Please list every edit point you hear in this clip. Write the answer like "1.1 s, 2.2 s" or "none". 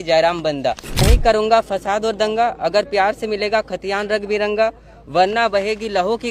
1.0 s